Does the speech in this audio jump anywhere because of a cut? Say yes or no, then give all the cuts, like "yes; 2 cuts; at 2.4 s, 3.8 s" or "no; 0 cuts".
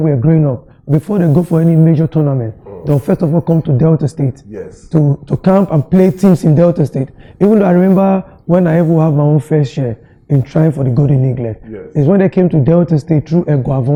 no; 0 cuts